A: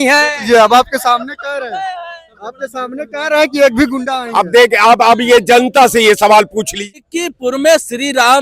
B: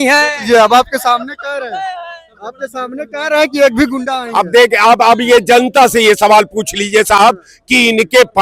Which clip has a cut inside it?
A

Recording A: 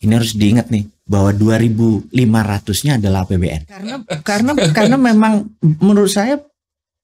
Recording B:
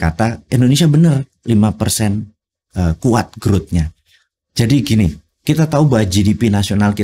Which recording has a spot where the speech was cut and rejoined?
A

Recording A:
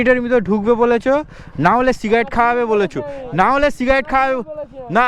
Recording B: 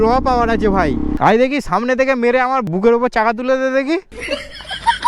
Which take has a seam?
B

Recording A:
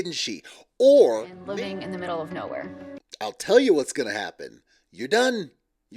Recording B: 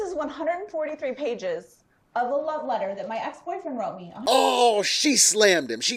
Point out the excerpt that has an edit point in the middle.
A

